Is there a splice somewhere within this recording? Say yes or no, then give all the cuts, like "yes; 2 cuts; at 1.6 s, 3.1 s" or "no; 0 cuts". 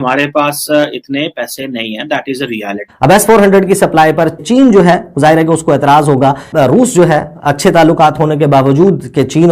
yes; 3 cuts; at 2.8 s, 4.4 s, 6.5 s